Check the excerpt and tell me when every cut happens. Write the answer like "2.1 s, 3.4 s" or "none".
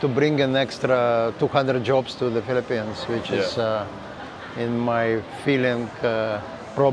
none